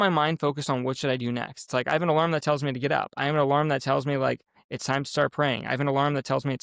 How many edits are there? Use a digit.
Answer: 0